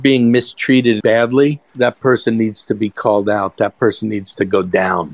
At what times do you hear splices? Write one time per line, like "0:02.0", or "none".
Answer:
0:01.0
0:01.6

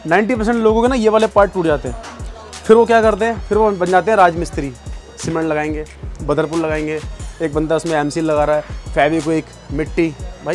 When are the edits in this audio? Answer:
none

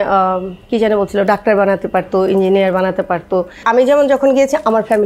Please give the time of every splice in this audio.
0:03.6

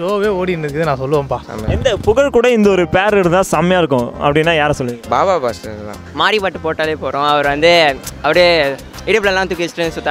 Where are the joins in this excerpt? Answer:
none

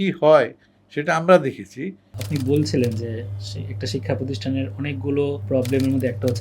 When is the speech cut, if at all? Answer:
0:02.2
0:05.4

